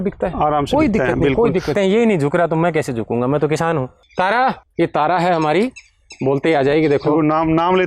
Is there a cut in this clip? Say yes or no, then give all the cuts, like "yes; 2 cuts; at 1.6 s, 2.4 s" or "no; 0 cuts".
yes; 3 cuts; at 1.7 s, 3.9 s, 4.7 s